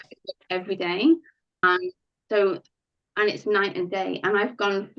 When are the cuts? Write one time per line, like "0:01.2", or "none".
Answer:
0:01.6

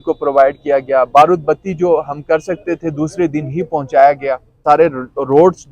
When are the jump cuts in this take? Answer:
0:04.6

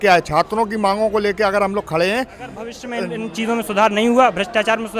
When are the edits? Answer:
0:02.8

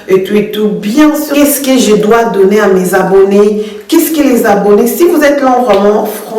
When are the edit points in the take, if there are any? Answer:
0:01.3

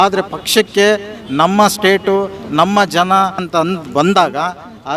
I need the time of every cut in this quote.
0:03.5

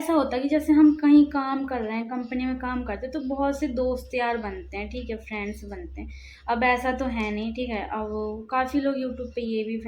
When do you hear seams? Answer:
none

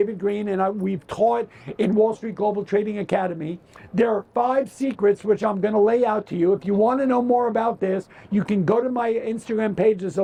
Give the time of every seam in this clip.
none

